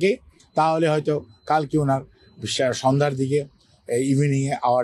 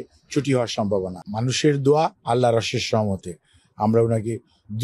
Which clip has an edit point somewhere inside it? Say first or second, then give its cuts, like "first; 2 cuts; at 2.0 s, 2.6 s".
second; 1 cut; at 1.2 s